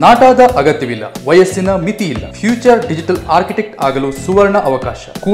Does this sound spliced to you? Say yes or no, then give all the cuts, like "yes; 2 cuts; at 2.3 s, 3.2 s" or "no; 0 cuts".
no; 0 cuts